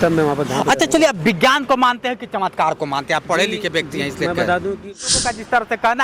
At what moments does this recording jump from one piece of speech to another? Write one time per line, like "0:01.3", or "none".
0:05.1